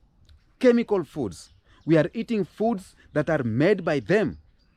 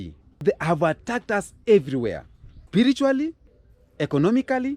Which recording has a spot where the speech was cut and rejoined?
second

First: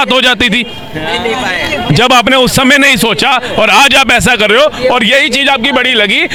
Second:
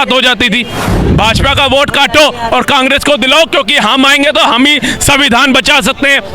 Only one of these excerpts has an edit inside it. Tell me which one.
second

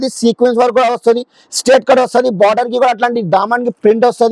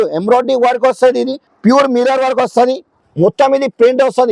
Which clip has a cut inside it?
second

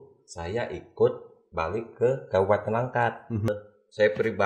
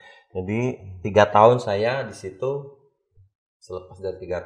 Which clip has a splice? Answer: first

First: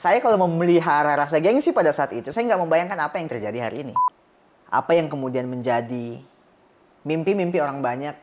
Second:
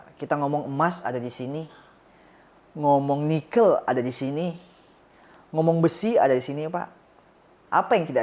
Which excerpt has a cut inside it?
first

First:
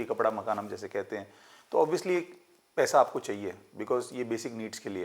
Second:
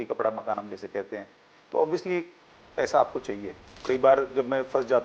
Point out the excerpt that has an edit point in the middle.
second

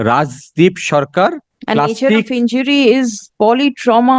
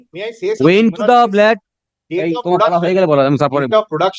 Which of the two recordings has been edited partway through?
first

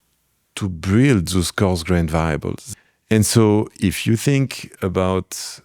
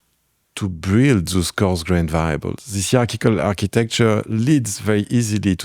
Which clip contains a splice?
first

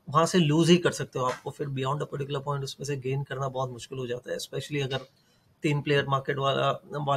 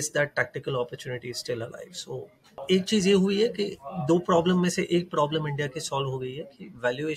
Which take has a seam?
second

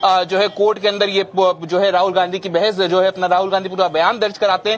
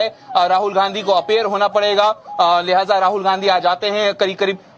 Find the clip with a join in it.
second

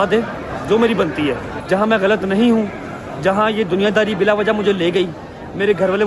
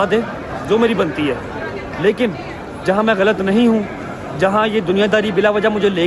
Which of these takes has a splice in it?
first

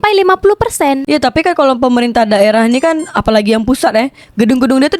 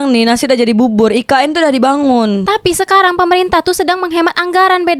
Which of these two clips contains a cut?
first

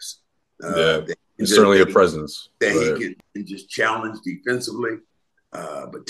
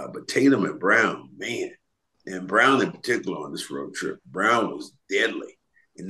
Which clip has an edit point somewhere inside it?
first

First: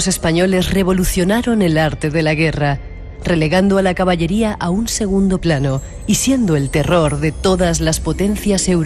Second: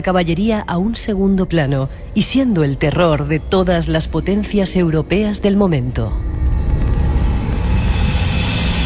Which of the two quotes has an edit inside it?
second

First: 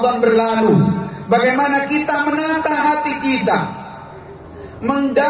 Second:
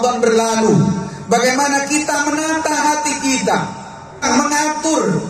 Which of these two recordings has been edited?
second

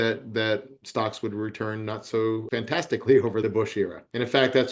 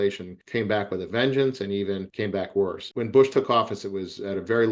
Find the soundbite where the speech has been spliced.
second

